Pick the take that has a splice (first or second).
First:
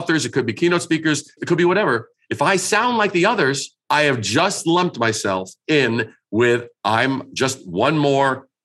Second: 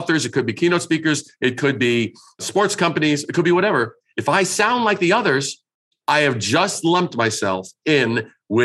first